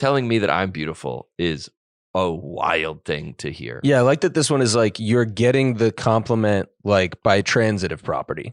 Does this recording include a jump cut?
no; 0 cuts

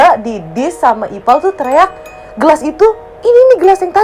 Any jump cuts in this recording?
no; 0 cuts

